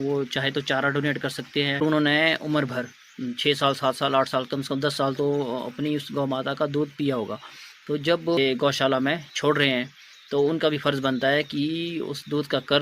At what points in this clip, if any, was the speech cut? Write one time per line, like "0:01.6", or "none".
0:01.8
0:08.4